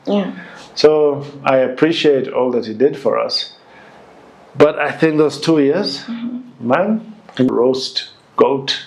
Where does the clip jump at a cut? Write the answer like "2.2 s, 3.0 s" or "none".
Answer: 7.5 s